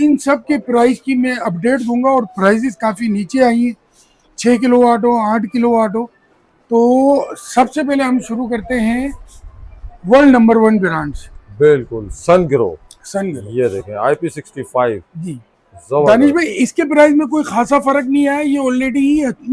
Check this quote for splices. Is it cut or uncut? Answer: uncut